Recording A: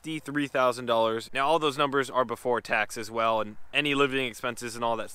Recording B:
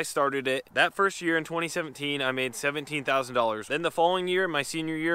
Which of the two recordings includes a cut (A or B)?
A